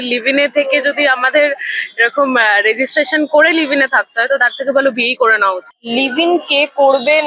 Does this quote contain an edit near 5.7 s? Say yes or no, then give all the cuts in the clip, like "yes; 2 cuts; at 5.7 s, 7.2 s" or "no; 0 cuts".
yes; 1 cut; at 5.7 s